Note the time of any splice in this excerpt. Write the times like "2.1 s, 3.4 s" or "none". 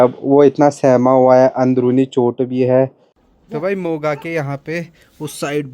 3.3 s